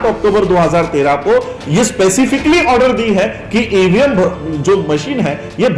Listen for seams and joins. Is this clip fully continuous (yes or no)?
yes